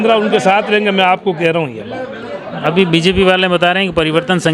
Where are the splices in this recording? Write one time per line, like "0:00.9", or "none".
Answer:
none